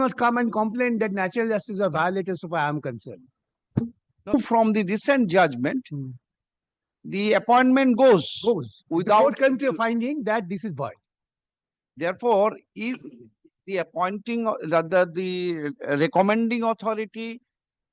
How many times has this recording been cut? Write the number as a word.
one